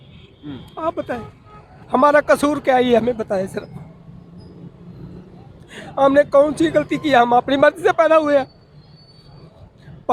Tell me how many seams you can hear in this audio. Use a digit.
1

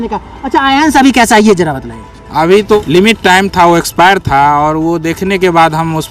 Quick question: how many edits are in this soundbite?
1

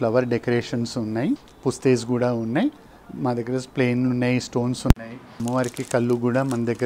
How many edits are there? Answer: 2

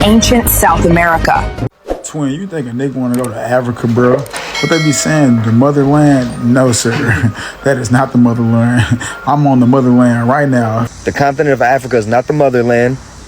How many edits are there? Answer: 2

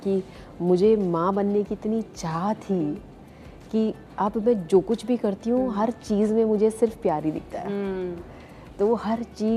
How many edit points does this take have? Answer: 0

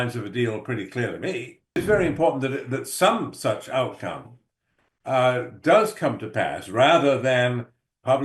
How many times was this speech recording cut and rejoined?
1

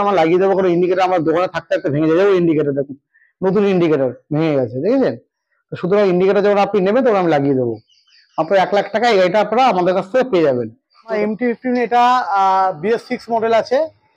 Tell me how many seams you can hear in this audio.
1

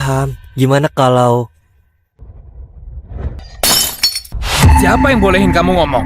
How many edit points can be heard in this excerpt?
1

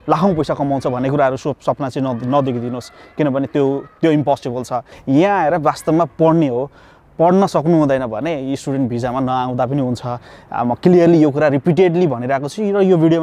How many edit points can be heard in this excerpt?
1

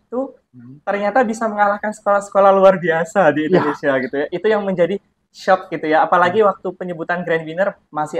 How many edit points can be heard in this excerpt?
0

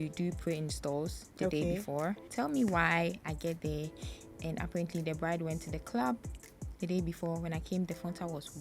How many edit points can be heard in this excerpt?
1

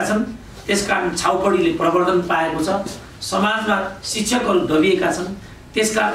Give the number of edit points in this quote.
0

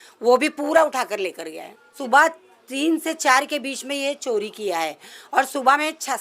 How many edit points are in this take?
1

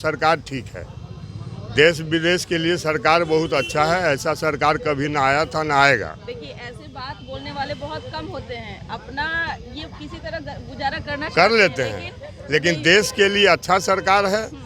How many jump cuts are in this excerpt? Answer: 0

